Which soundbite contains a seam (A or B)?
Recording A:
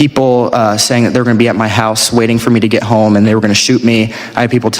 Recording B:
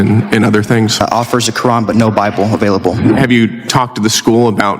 B